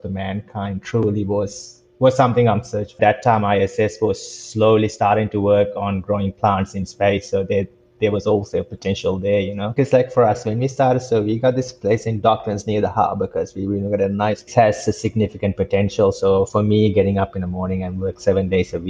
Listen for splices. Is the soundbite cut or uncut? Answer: cut